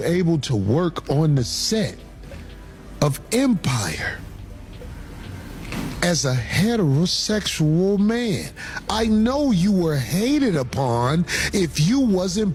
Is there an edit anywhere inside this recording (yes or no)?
no